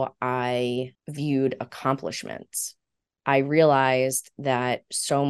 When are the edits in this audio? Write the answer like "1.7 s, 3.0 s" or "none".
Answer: 1.0 s